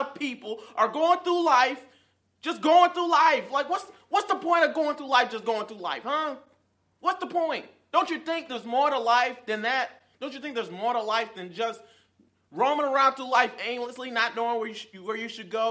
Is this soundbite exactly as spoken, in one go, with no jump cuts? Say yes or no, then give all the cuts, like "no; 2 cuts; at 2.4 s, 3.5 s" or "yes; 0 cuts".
yes; 0 cuts